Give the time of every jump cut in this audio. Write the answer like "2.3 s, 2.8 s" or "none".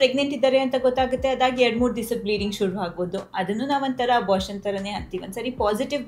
none